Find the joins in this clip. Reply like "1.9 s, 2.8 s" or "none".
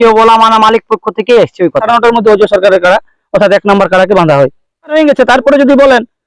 1.8 s, 4.9 s